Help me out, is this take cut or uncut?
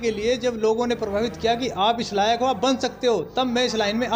uncut